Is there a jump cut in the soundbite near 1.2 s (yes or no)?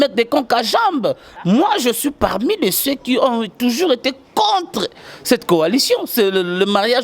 yes